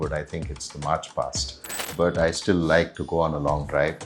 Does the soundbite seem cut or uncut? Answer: cut